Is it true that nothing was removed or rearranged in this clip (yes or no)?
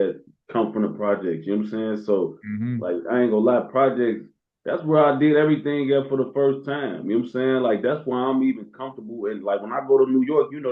yes